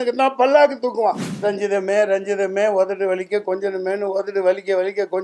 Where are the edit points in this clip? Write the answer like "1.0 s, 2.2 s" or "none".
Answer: 1.3 s